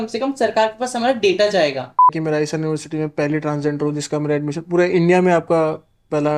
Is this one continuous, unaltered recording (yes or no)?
no